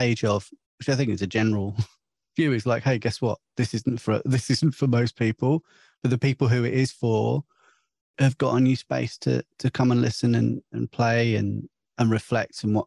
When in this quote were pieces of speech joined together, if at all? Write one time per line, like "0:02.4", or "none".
none